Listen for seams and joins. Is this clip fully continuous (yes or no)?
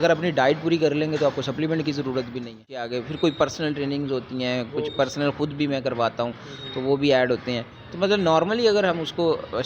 no